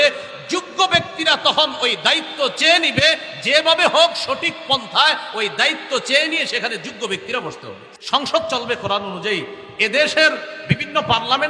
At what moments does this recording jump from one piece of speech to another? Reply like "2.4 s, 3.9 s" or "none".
7.9 s